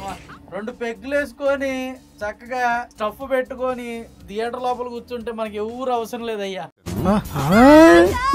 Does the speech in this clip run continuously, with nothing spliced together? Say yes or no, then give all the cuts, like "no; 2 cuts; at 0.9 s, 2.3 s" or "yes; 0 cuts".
yes; 0 cuts